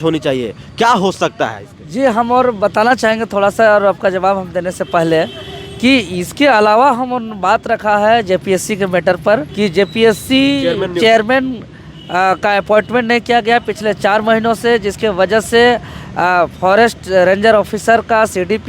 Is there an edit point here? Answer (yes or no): no